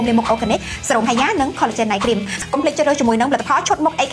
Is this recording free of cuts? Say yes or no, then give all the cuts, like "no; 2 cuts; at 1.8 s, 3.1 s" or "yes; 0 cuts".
no; 1 cut; at 2.4 s